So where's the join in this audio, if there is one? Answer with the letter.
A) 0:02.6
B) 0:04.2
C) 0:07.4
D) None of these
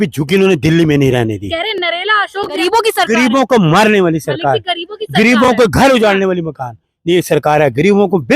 A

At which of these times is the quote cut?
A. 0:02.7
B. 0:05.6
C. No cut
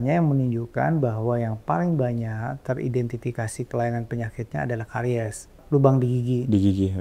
B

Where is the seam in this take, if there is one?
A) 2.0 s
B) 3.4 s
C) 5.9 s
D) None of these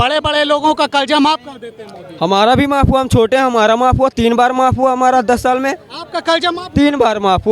D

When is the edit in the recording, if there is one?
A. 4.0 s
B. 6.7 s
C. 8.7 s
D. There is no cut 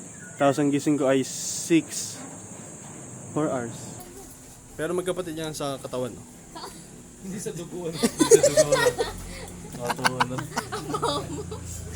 A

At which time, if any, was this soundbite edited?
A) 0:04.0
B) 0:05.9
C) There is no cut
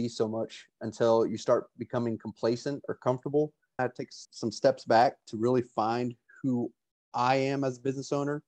A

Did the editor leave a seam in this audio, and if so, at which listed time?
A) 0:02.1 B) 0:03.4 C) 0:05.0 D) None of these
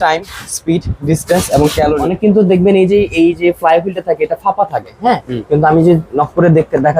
A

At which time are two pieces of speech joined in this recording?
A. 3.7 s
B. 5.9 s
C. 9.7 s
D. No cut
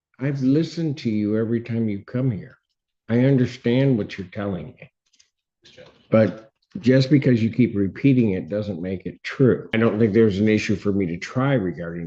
C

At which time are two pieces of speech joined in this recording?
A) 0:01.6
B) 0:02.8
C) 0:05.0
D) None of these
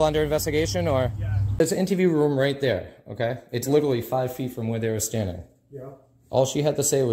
A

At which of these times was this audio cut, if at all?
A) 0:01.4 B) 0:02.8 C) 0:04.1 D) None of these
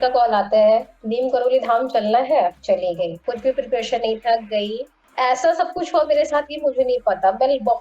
B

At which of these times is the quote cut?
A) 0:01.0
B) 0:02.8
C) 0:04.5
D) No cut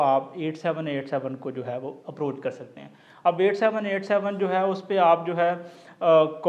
D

